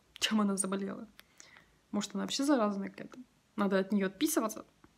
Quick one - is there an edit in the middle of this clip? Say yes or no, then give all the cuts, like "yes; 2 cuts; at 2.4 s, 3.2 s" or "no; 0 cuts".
no; 0 cuts